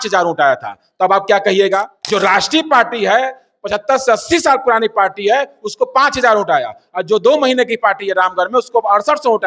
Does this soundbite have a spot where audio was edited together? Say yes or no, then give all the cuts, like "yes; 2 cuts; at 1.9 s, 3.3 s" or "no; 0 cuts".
yes; 1 cut; at 2.0 s